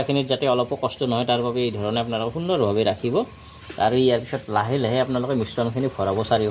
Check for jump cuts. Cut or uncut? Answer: uncut